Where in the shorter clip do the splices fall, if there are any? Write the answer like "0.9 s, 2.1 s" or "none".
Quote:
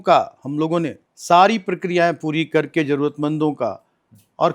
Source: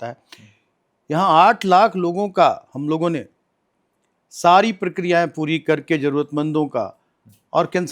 1.1 s

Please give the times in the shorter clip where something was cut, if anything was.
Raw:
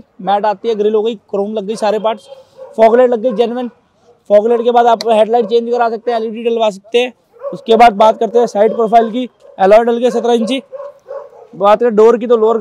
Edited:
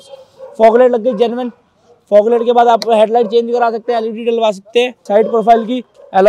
5.1 s

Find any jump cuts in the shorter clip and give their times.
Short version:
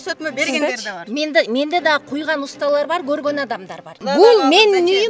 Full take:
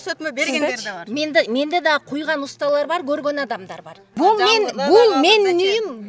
4.0 s

